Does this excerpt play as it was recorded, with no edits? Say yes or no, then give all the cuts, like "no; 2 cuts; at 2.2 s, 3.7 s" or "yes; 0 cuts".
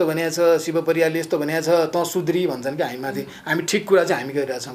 yes; 0 cuts